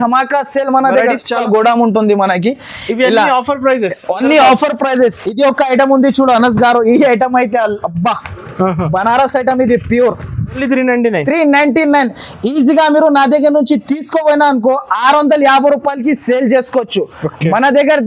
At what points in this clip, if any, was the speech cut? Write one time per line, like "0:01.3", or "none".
0:01.4
0:10.6